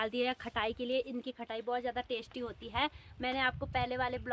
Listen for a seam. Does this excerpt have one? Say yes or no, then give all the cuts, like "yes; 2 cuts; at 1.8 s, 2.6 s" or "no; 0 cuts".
no; 0 cuts